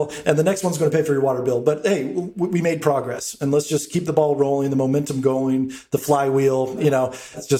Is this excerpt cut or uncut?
uncut